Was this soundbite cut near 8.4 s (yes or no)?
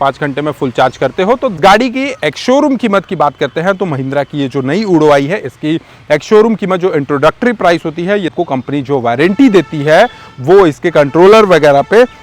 yes